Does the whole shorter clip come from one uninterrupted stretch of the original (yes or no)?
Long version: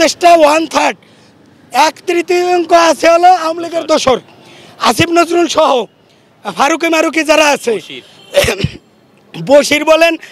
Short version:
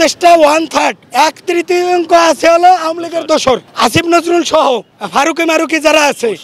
no